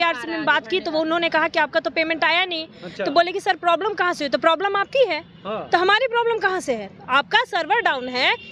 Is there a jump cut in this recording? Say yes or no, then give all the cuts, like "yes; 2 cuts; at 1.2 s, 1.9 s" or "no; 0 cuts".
no; 0 cuts